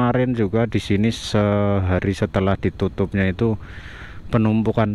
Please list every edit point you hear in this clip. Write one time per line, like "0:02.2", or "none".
none